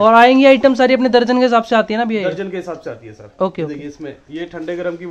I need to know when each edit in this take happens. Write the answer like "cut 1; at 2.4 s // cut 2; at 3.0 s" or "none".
none